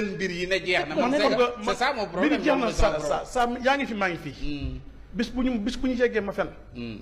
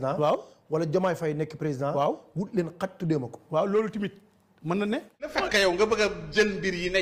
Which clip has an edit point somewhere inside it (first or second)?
second